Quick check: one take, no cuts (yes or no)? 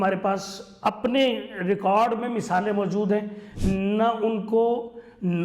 no